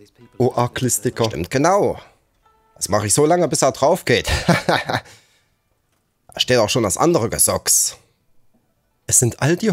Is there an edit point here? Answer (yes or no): no